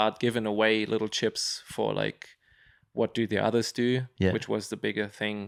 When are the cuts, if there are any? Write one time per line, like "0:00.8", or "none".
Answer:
none